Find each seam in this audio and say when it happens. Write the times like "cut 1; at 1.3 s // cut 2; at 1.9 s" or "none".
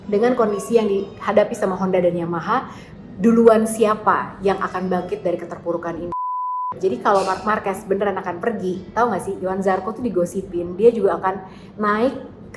cut 1; at 6.6 s

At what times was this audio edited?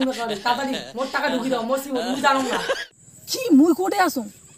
cut 1; at 2.8 s

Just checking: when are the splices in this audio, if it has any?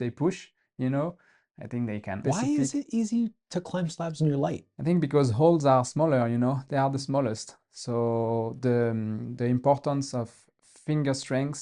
cut 1; at 2.2 s // cut 2; at 4.7 s

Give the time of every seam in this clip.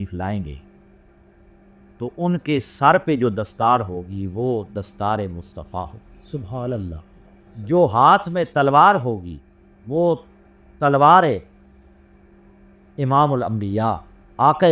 none

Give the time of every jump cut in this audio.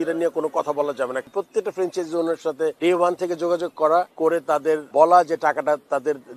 cut 1; at 1.2 s // cut 2; at 2.8 s // cut 3; at 4.5 s

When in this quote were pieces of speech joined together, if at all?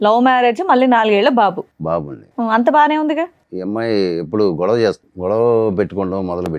cut 1; at 3.5 s // cut 2; at 5.1 s

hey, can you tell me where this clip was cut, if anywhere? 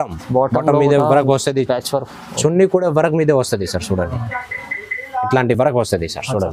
none

